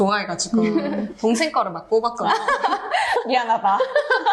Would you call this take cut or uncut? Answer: cut